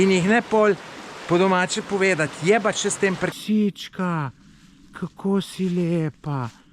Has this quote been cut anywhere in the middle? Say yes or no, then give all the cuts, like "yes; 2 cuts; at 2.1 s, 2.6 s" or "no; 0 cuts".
yes; 1 cut; at 3.3 s